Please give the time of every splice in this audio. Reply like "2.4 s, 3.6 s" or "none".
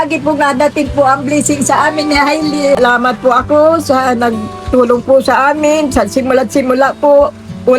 2.8 s